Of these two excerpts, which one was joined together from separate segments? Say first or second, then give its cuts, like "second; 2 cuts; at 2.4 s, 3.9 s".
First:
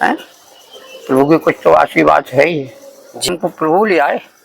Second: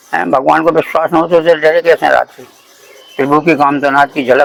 first; 1 cut; at 3.3 s